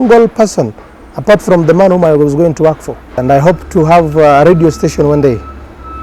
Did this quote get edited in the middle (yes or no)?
yes